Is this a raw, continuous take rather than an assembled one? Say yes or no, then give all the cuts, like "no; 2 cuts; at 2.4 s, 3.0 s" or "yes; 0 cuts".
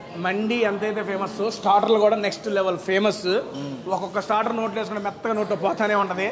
yes; 0 cuts